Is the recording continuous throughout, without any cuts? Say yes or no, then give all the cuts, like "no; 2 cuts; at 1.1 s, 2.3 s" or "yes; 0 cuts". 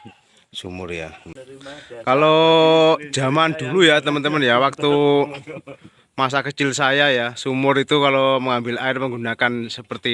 no; 1 cut; at 1.3 s